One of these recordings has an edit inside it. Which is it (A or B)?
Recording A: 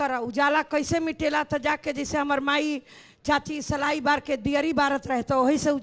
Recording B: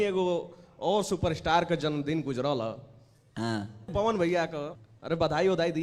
B